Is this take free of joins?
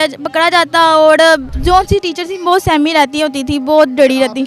no; 1 cut; at 1.5 s

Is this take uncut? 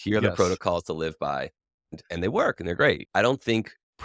no; 2 cuts; at 1.9 s, 3.0 s

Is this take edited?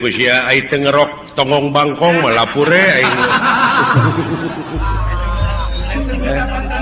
no; 0 cuts

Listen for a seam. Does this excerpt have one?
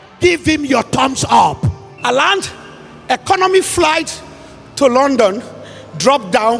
yes; 1 cut; at 1.9 s

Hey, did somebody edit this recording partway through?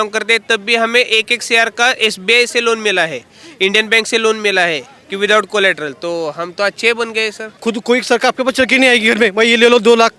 yes; 1 cut; at 7.6 s

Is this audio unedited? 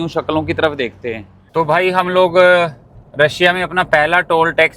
no; 1 cut; at 1.3 s

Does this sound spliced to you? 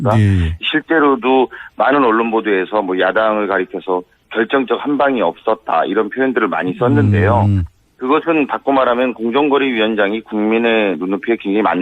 yes; 1 cut; at 3.5 s

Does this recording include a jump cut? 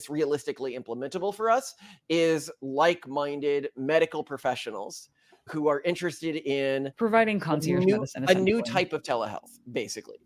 no; 0 cuts

